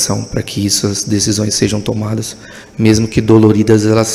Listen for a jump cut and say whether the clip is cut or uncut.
uncut